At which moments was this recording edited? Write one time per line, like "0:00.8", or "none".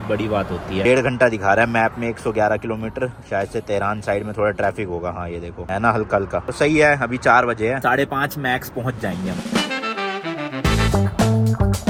none

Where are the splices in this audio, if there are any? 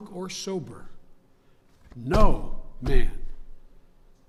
none

